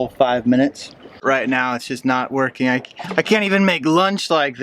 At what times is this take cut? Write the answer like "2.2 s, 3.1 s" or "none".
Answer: 1.2 s

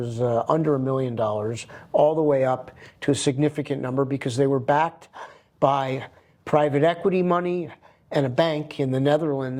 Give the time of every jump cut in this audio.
none

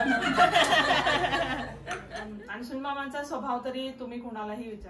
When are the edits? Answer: 2.0 s

